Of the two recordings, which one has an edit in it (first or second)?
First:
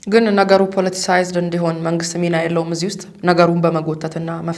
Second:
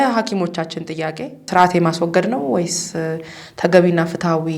second